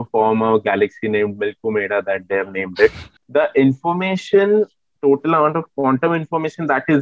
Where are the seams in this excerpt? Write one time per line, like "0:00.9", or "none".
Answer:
0:03.1